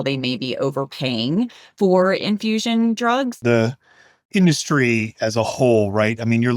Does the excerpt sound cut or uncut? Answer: cut